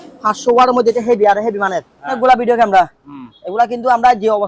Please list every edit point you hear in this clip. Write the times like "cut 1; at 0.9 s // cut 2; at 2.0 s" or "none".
cut 1; at 2.1 s